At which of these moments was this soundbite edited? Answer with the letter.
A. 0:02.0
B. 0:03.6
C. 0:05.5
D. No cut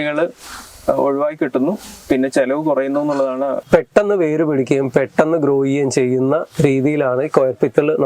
B